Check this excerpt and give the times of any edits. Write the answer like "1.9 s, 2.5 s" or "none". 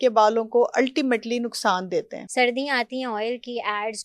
2.2 s